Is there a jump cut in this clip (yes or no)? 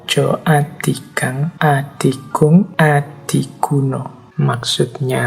yes